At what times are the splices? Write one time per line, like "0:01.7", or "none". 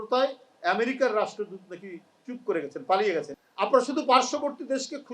0:03.3